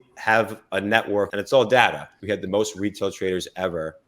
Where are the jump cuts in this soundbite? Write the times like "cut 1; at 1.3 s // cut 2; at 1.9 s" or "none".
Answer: cut 1; at 1.3 s // cut 2; at 2.1 s